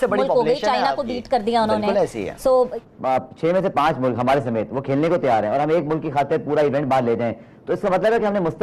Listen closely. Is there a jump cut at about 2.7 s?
yes; 1 cut; at 2.7 s

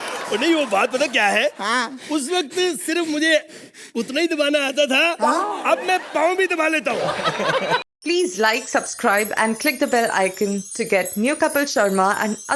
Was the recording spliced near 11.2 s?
no; 1 cut; at 7.8 s

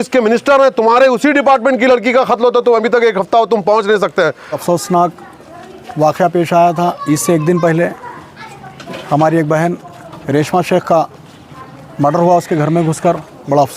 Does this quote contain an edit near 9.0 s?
no; 1 cut; at 4.6 s

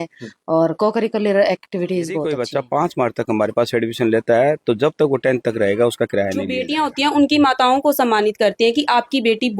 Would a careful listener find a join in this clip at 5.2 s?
no; 2 cuts; at 2.3 s, 6.6 s

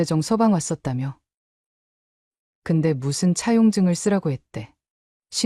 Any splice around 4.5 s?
no; 0 cuts

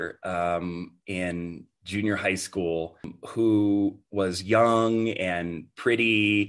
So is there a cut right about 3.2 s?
yes; 1 cut; at 3.2 s

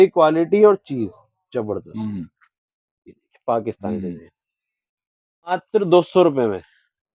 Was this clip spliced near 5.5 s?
yes; 1 cut; at 5.5 s

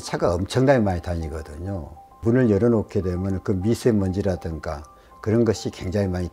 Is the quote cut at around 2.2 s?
yes; 1 cut; at 2.2 s

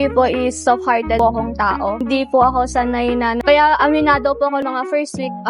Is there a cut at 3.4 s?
yes; 1 cut; at 3.4 s

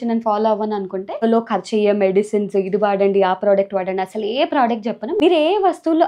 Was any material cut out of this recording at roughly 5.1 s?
yes; 2 cuts; at 1.2 s, 5.1 s

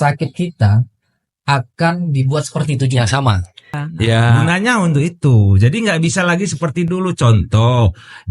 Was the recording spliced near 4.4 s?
yes; 1 cut; at 4.4 s

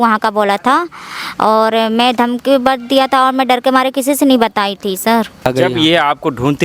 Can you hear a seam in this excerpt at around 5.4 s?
yes; 1 cut; at 5.4 s

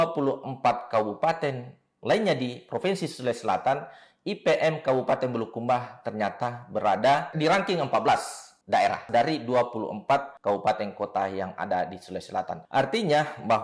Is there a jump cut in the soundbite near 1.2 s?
no; 2 cuts; at 9.0 s, 10.3 s

